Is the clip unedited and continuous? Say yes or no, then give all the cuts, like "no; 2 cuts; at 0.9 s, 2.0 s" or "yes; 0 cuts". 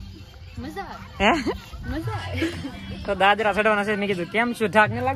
yes; 0 cuts